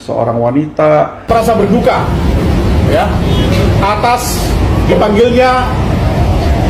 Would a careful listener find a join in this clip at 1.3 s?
yes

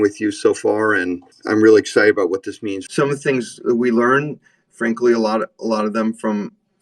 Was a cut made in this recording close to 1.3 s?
yes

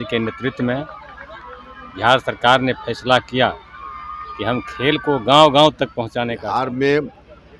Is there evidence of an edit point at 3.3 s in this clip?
no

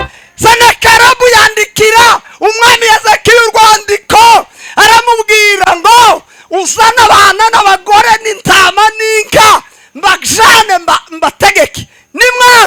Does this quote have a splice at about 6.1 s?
no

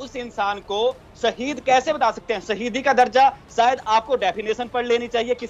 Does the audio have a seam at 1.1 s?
no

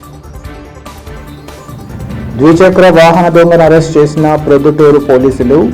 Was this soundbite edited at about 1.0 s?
yes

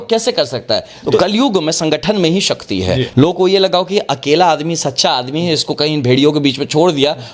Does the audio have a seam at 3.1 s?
yes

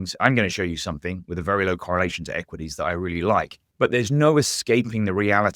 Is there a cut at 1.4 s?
no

